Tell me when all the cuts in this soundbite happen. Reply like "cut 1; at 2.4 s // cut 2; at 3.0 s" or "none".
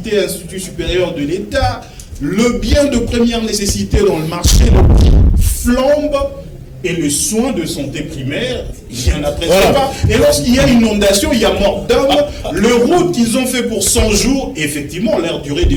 none